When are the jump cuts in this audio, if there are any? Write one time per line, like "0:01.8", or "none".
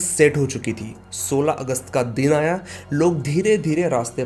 none